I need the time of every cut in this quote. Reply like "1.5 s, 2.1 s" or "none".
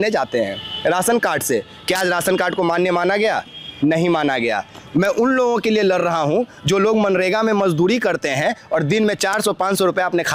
none

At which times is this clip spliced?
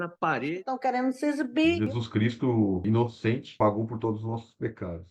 none

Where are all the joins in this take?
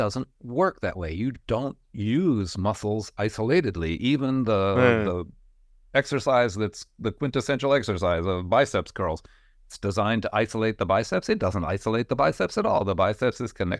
none

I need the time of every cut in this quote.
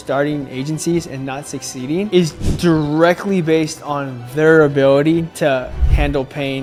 none

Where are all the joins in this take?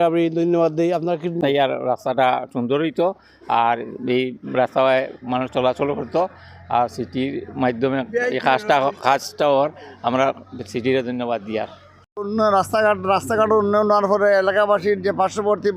1.3 s, 12.2 s

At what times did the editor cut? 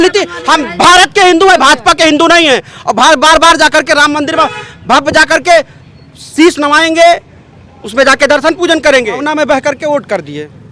9.3 s

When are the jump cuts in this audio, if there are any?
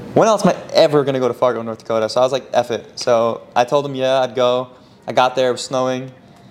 none

